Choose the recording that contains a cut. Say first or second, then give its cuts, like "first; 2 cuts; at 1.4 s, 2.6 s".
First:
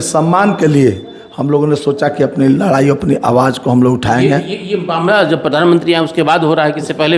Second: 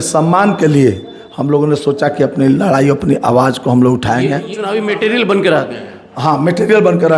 second; 1 cut; at 4.5 s